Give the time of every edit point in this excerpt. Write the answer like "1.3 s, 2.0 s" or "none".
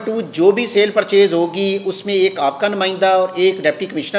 none